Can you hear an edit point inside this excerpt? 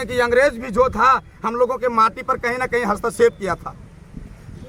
no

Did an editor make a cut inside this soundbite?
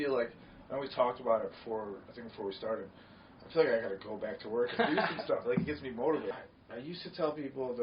yes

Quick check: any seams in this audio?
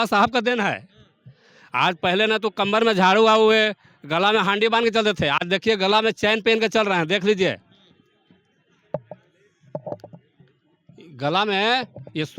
no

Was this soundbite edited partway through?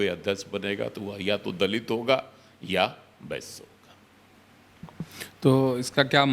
no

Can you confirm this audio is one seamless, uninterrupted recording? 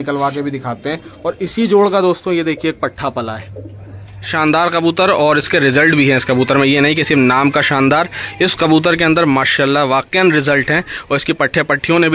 no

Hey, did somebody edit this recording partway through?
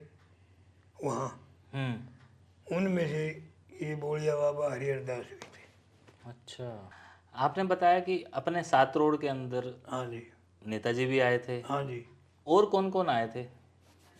yes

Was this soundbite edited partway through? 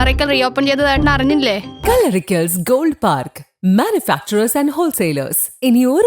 yes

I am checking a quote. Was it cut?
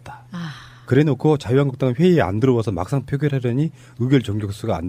yes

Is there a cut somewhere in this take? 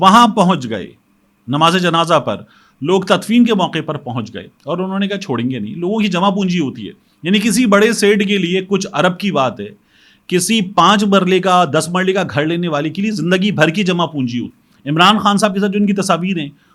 yes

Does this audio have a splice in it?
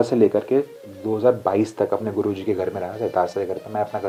no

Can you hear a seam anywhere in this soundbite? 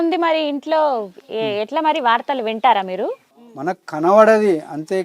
yes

